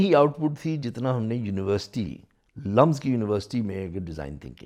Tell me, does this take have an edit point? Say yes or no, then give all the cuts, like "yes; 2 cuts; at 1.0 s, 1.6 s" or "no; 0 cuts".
no; 0 cuts